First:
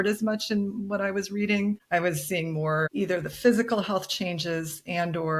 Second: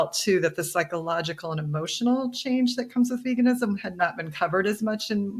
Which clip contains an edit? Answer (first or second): first